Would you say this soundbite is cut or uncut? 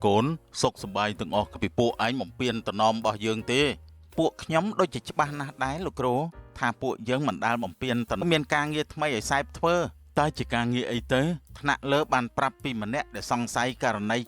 cut